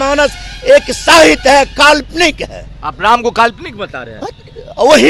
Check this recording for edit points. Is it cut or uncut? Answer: uncut